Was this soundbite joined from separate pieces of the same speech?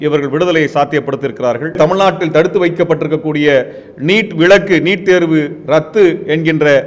yes; 1 cut; at 1.8 s

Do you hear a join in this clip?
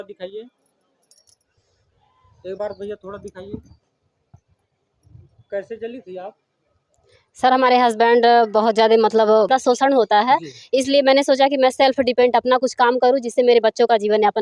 yes; 1 cut; at 9.5 s

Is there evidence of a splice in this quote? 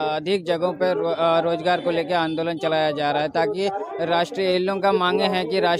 no; 0 cuts

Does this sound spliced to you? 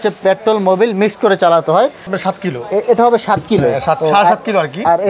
yes; 1 cut; at 2.1 s

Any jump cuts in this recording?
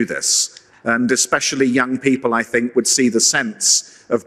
no; 0 cuts

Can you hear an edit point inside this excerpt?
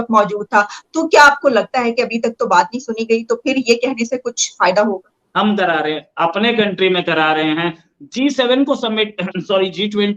yes; 1 cut; at 5.2 s

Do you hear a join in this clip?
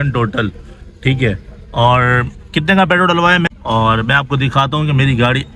yes; 1 cut; at 3.5 s

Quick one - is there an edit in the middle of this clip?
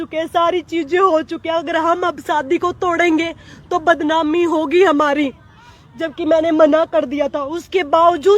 no; 0 cuts

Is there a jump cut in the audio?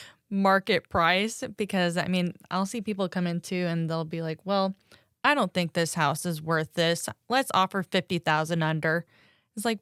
no; 0 cuts

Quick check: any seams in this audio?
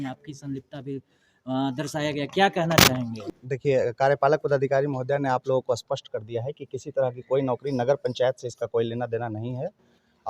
yes; 1 cut; at 3.2 s

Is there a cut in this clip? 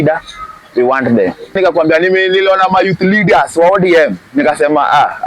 yes; 1 cut; at 1.6 s

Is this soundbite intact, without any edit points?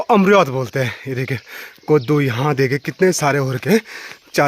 yes; 0 cuts

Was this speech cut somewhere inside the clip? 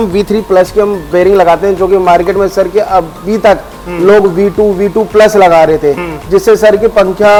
no; 0 cuts

